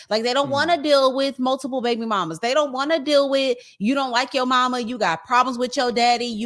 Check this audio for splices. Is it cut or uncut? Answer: uncut